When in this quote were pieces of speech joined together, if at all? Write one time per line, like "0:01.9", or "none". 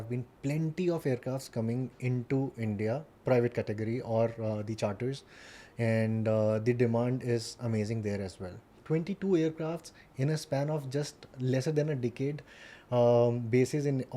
0:08.8